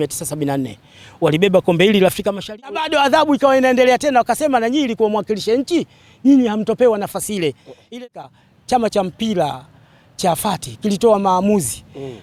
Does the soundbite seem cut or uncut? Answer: cut